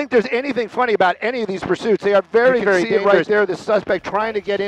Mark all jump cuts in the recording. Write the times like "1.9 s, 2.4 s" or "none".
2.9 s